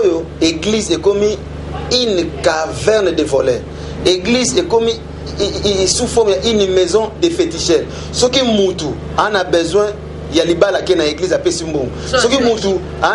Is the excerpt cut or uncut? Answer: uncut